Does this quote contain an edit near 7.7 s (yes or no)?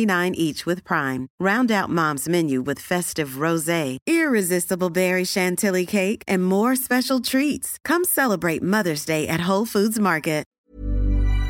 no